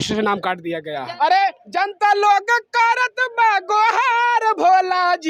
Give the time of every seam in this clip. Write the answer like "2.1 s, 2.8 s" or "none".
1.0 s